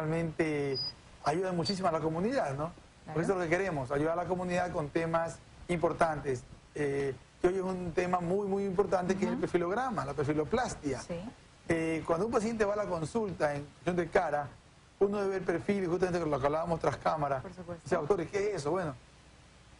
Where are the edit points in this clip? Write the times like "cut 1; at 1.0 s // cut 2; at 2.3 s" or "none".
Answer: cut 1; at 10.1 s

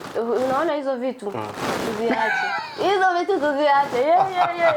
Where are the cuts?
none

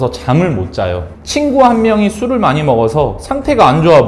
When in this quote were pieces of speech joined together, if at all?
cut 1; at 1.2 s

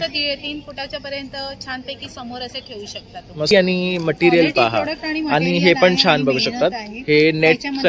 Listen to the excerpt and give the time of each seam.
cut 1; at 3.5 s

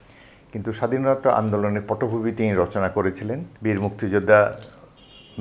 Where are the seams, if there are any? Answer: cut 1; at 3.5 s

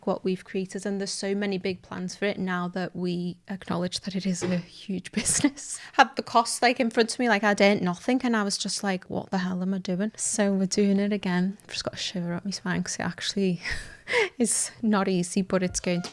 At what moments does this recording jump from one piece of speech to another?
cut 1; at 5.8 s // cut 2; at 10.1 s

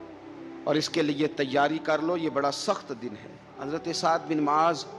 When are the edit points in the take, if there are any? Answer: cut 1; at 3.5 s

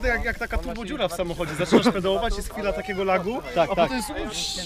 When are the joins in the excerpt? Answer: none

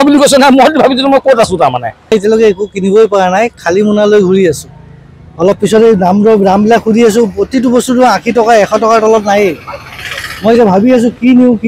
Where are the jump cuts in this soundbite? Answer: cut 1; at 2.1 s

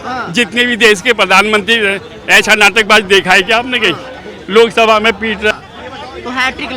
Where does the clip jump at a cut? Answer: cut 1; at 5.5 s

